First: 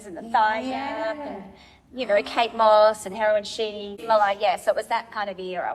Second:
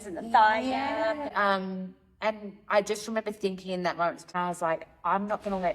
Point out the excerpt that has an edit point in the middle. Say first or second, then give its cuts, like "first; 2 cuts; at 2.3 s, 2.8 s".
second; 2 cuts; at 1.3 s, 4.3 s